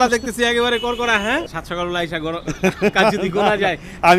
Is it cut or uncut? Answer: cut